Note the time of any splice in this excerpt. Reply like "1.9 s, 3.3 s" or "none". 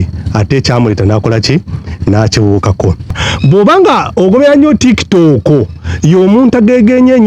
3.2 s